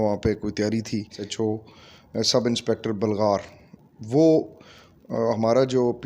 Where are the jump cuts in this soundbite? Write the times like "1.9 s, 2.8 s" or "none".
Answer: 1.2 s